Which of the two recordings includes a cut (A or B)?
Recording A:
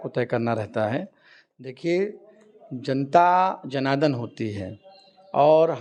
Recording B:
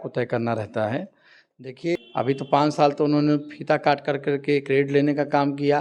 B